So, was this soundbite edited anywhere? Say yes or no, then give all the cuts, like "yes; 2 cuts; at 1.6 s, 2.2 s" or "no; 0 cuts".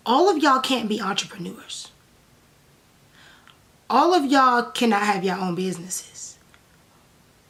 no; 0 cuts